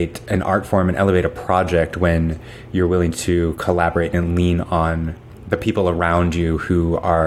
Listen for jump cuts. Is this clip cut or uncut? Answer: uncut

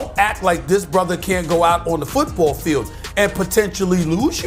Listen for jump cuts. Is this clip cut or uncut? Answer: uncut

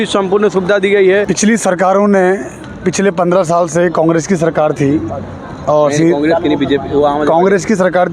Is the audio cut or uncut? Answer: cut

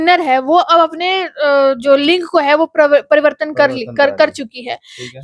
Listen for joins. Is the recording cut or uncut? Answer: uncut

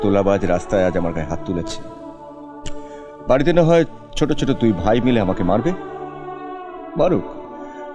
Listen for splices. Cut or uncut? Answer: uncut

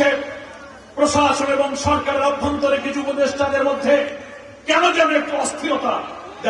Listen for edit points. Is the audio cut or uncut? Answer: uncut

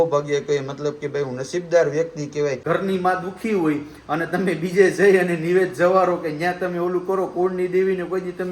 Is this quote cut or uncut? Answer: cut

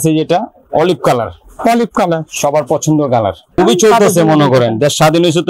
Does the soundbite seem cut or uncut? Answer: cut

